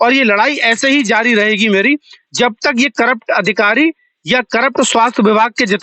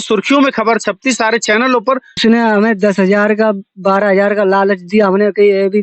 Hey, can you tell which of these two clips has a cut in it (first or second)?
second